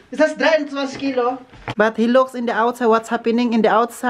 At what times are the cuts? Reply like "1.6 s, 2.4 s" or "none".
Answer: 1.6 s